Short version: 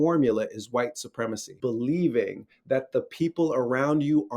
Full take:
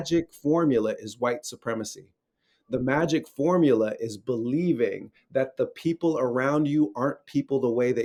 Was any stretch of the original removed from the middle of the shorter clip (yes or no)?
yes